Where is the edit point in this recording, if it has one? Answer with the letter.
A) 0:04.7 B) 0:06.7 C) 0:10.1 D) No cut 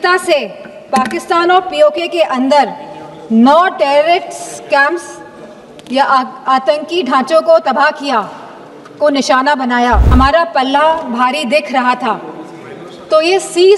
C